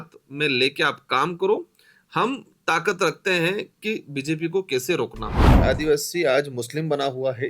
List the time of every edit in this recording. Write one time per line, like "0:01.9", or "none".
0:05.6

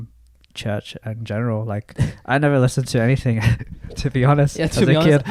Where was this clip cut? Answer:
none

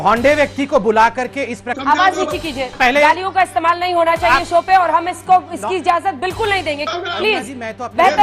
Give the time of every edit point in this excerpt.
0:01.7
0:02.8
0:06.9

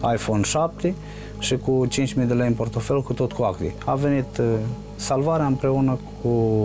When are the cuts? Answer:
none

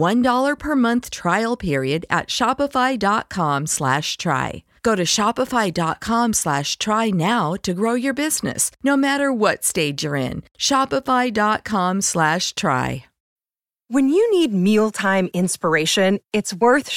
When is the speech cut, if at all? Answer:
0:13.2

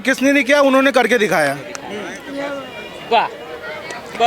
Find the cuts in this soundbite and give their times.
none

